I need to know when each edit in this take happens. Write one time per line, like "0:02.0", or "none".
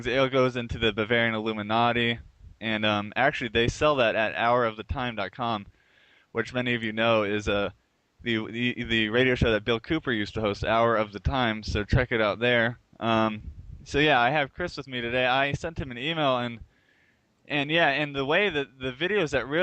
0:18.1